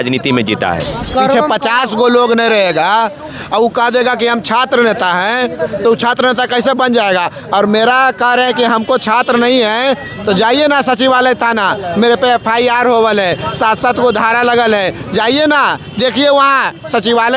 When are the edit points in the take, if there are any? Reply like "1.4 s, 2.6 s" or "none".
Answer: 1.1 s